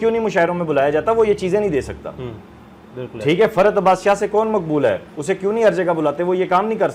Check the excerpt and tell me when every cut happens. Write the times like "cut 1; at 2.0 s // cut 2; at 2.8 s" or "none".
none